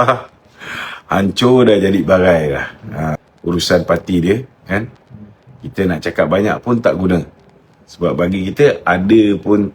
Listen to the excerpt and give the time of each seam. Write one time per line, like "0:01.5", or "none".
0:03.2